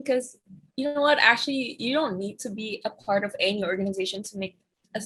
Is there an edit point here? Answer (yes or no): no